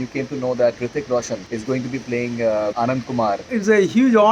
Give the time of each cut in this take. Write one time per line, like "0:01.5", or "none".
0:01.4
0:03.2